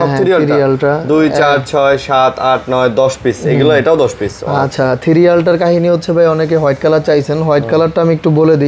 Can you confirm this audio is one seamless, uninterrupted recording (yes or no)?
yes